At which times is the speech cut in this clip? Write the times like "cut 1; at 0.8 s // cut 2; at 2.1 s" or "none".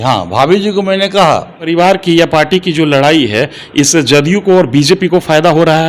cut 1; at 1.7 s